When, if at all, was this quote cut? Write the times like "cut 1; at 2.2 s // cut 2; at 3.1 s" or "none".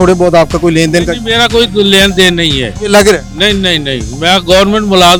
none